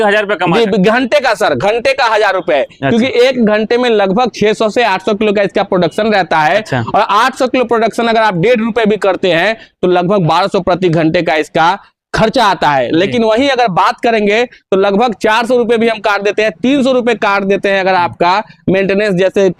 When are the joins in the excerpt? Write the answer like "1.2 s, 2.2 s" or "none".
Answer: none